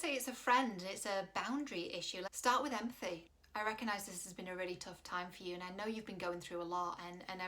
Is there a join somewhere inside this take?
yes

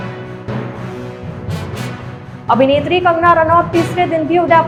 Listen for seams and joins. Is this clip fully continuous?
yes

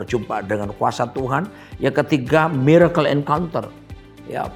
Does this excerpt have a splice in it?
no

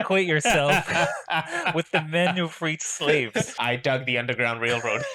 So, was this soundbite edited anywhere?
yes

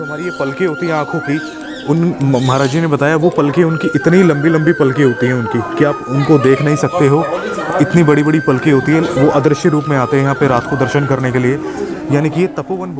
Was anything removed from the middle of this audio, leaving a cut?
no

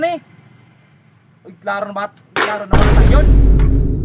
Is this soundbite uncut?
no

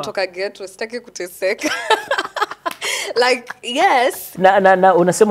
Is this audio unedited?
no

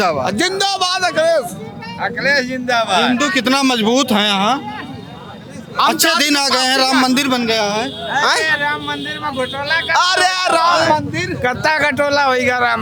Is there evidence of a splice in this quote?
no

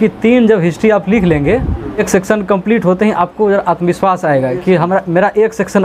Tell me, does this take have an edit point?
yes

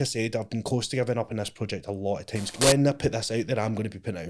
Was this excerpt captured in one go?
no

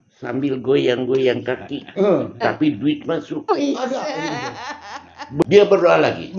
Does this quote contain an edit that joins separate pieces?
yes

